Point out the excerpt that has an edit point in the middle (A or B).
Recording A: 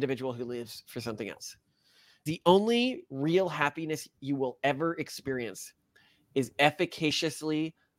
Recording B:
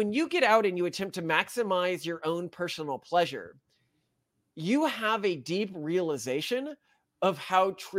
A